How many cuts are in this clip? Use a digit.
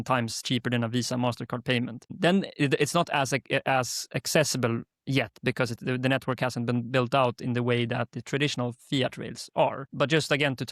2